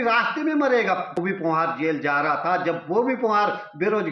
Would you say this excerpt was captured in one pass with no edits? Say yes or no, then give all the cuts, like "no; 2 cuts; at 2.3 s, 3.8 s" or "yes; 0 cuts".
no; 1 cut; at 1.2 s